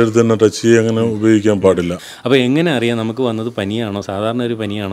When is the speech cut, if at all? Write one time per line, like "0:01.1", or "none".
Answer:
0:02.0